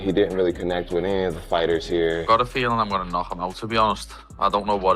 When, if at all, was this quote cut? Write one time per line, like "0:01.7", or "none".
0:02.2